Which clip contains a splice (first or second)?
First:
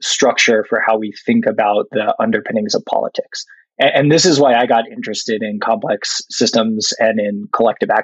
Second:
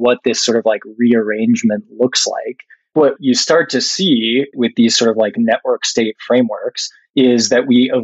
second